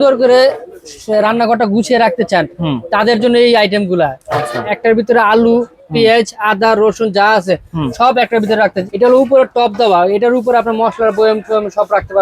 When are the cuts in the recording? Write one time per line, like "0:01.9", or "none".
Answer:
0:08.8